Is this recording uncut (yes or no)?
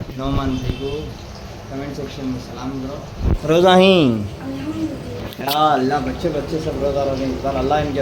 yes